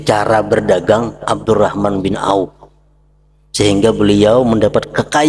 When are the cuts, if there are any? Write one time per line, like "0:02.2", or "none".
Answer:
none